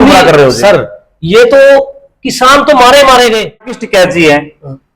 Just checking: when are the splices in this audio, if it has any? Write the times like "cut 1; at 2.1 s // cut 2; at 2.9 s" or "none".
cut 1; at 3.8 s